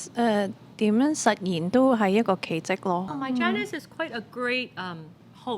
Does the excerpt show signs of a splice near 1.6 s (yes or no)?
no